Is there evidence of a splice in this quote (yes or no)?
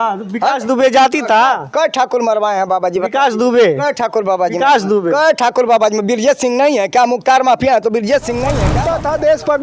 yes